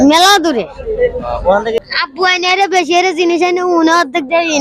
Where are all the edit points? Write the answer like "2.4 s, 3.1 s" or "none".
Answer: 1.8 s